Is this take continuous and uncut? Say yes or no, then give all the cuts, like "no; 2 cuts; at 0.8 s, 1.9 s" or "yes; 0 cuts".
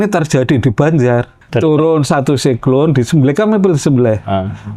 no; 1 cut; at 1.4 s